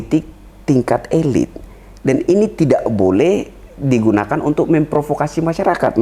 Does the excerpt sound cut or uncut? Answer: uncut